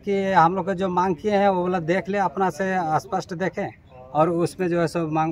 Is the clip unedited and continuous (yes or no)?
yes